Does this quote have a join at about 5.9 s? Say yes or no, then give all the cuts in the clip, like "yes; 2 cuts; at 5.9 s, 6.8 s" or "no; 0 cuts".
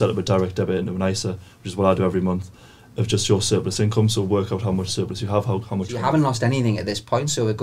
yes; 1 cut; at 5.9 s